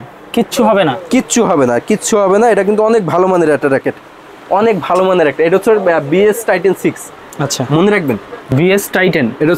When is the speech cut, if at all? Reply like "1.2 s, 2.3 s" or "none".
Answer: 8.3 s